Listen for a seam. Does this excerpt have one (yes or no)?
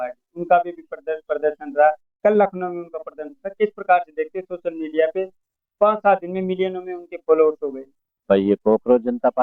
no